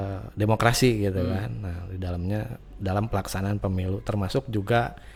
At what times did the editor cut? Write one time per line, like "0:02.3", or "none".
none